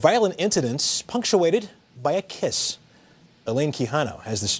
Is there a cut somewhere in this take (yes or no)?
yes